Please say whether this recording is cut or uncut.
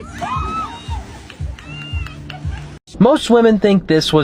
cut